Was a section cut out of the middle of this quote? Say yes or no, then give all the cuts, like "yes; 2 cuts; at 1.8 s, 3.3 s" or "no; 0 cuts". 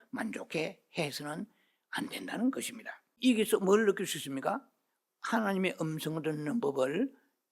yes; 1 cut; at 3.2 s